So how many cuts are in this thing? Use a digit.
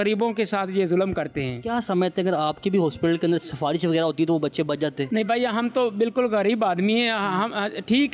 0